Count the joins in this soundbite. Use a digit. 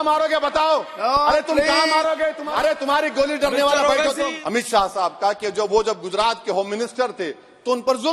2